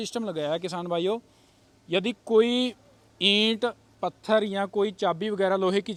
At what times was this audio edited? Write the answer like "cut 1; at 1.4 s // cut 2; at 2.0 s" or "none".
none